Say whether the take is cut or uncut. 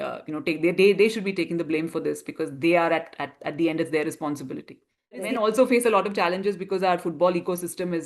cut